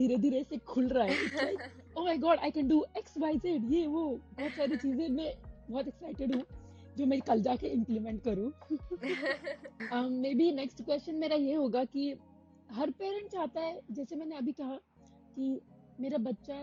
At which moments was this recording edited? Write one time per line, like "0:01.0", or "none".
none

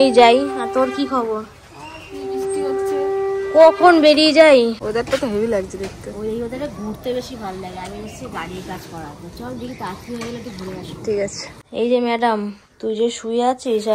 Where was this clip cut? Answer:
0:04.8
0:11.8

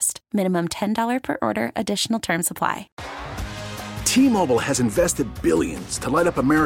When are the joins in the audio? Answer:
0:02.9

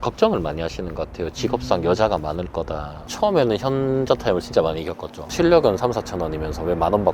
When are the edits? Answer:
0:03.0
0:05.2

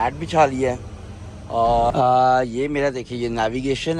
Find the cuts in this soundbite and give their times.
0:01.9

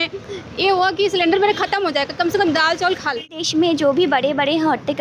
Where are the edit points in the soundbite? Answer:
0:03.4

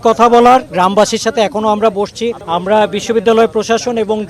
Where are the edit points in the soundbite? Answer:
0:02.4

